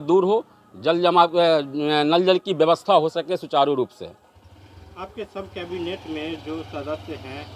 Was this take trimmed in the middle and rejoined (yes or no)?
no